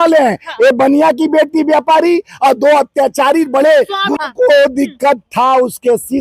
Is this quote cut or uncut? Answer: cut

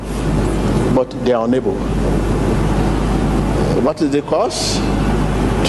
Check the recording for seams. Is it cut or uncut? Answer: uncut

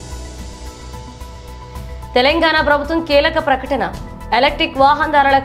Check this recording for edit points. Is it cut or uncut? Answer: cut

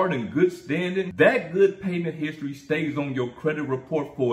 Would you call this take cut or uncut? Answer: cut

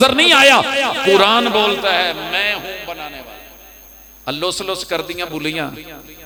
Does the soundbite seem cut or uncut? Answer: uncut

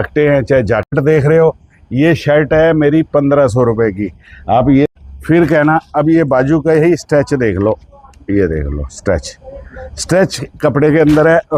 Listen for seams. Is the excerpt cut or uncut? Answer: cut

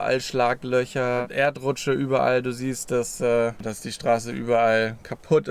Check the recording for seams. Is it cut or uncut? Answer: cut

